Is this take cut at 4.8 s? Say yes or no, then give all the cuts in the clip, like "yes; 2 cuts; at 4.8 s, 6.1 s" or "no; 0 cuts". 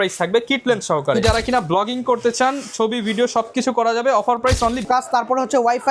yes; 2 cuts; at 1.2 s, 4.8 s